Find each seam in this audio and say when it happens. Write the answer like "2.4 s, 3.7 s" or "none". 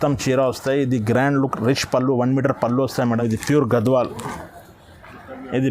3.2 s

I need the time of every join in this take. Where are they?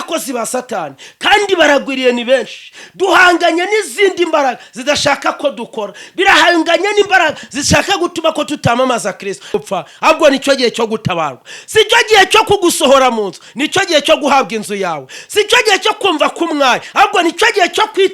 9.5 s

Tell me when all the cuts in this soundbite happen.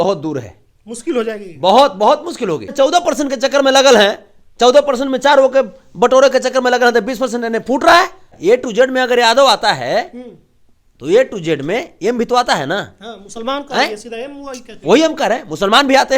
2.7 s, 8.3 s

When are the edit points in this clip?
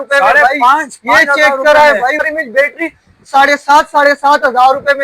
2.2 s

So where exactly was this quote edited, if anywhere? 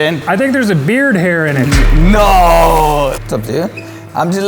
3.2 s

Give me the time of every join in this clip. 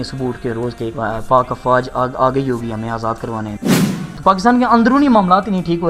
0.9 s, 3.8 s

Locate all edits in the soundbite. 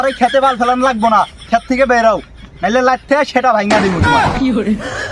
4.0 s

